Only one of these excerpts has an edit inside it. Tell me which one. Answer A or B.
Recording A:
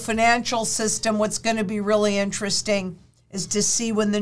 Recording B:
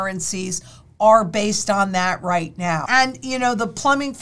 B